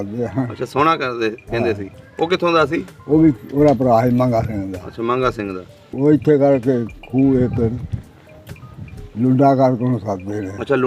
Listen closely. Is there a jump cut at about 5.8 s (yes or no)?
yes